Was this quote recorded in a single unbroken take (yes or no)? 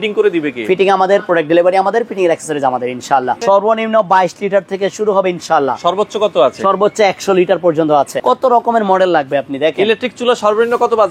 no